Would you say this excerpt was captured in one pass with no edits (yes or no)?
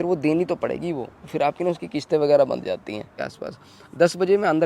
no